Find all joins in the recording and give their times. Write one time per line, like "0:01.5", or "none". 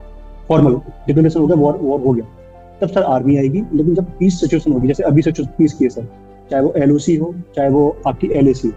none